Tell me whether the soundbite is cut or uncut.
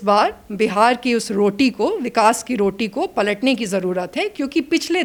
uncut